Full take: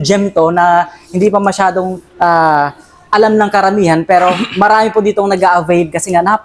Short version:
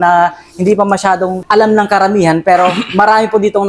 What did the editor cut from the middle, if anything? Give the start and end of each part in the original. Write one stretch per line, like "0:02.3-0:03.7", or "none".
0:01.9-0:03.0